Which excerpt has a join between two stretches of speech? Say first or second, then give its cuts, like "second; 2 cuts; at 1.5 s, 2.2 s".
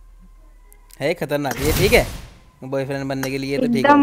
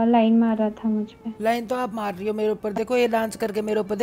second; 1 cut; at 1.2 s